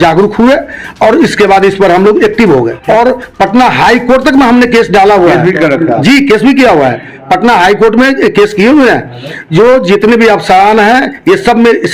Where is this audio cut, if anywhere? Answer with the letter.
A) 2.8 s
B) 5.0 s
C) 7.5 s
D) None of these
A